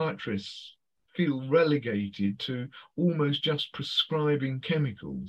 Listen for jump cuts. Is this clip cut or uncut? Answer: uncut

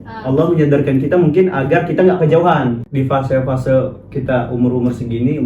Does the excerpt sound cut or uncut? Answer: cut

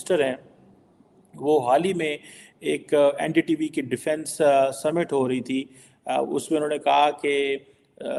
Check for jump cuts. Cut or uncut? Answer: uncut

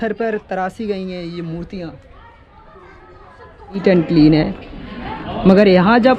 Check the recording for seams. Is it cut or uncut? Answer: cut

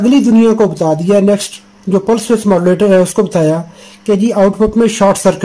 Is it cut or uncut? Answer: uncut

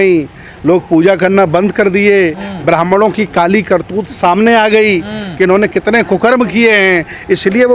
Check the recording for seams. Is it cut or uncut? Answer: uncut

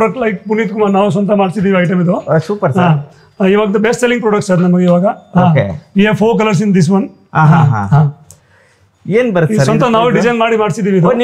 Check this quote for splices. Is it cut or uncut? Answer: uncut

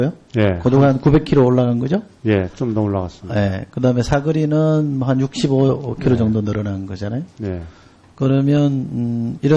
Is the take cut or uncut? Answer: cut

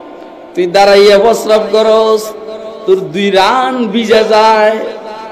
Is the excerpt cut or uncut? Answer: uncut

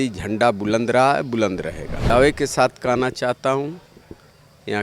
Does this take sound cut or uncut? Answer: cut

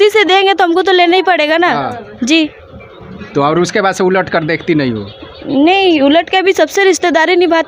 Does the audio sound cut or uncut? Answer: uncut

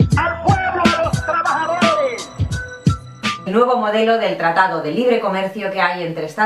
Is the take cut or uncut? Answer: uncut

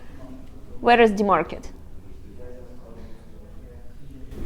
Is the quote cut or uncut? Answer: uncut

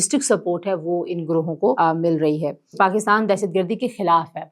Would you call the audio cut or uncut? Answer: cut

